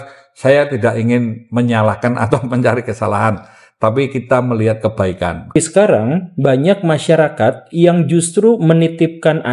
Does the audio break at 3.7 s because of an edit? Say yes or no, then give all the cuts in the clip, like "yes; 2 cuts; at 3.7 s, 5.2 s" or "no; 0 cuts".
no; 1 cut; at 5.5 s